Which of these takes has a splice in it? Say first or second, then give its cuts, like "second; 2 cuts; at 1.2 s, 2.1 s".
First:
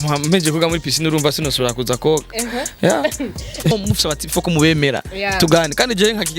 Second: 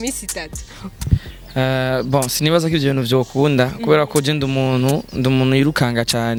first; 1 cut; at 3.7 s